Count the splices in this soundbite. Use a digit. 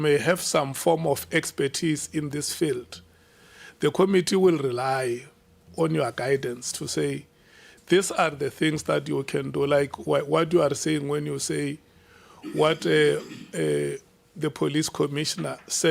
0